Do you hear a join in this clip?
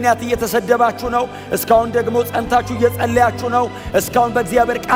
no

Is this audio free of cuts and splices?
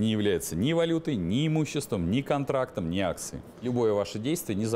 no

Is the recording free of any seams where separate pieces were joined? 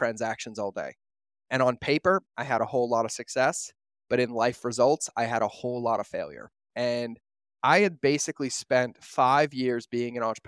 yes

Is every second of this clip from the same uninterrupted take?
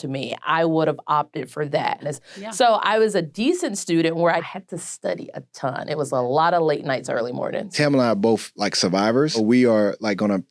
no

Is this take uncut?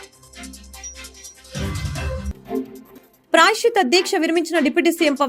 no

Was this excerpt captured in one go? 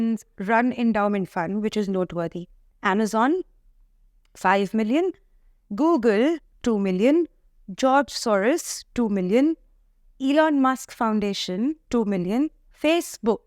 yes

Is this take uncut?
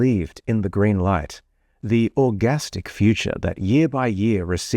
no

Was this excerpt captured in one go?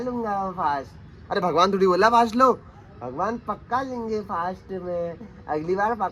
yes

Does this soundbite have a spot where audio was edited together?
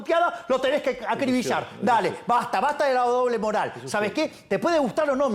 no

